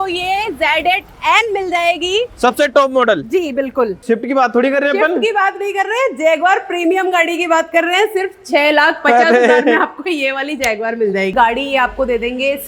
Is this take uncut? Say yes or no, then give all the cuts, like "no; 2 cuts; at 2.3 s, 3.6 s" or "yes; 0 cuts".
no; 2 cuts; at 4.0 s, 11.3 s